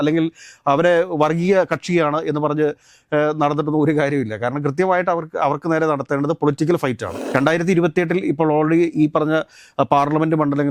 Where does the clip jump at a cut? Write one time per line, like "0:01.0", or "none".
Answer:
0:07.1